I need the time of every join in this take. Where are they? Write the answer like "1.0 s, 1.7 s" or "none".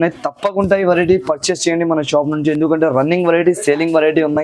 none